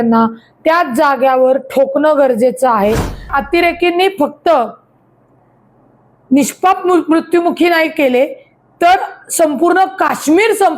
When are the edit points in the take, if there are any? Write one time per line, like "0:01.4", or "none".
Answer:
0:03.3